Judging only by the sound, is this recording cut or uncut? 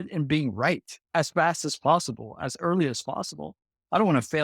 cut